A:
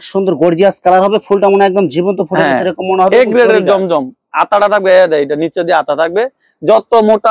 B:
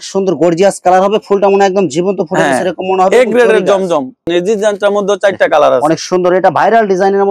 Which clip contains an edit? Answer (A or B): B